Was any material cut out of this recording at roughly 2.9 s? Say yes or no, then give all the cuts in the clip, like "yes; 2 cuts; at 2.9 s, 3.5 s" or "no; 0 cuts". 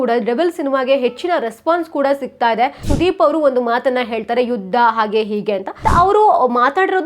yes; 2 cuts; at 2.9 s, 5.7 s